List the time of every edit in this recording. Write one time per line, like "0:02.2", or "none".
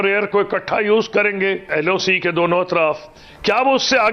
0:01.6